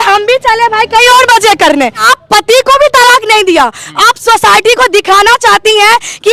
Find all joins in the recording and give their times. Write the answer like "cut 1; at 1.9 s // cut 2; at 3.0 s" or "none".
cut 1; at 2.1 s